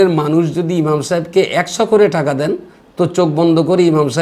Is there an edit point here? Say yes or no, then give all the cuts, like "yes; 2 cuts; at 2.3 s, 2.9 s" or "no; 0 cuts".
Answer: no; 0 cuts